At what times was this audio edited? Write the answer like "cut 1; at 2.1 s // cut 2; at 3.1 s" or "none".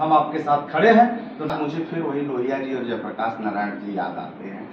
cut 1; at 1.5 s

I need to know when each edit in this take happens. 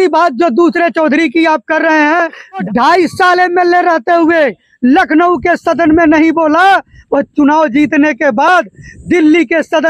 cut 1; at 2.7 s

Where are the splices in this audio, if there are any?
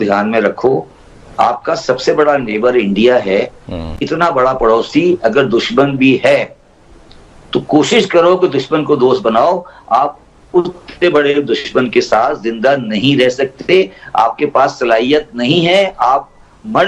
cut 1; at 4.0 s

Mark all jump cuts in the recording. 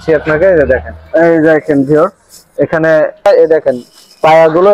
cut 1; at 3.3 s

